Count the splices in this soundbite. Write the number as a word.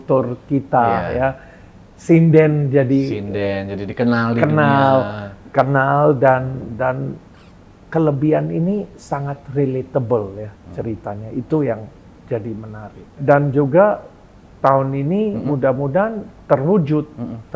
one